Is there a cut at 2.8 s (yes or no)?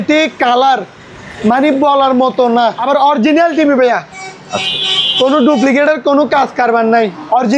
yes